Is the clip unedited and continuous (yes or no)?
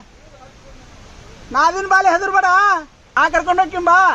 no